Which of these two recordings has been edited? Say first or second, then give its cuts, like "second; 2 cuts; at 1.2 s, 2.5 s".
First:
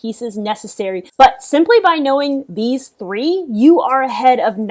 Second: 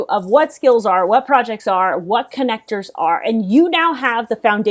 first; 1 cut; at 1.1 s